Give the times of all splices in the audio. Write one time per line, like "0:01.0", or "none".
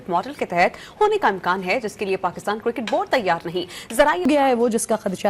0:04.3